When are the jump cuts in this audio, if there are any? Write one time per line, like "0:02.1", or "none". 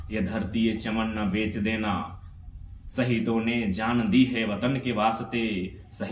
none